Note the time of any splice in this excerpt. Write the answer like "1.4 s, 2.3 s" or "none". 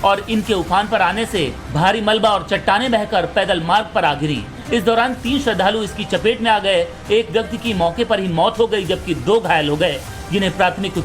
4.8 s